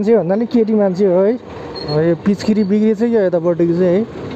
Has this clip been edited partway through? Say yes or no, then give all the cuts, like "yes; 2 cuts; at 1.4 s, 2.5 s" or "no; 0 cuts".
yes; 1 cut; at 1.9 s